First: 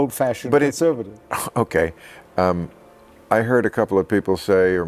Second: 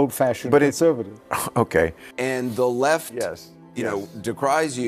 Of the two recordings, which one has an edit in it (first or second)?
second